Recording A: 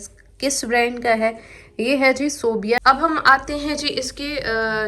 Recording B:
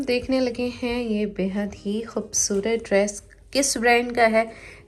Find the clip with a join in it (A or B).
A